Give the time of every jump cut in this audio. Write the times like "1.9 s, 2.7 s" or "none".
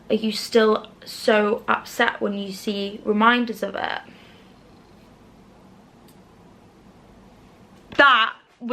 7.8 s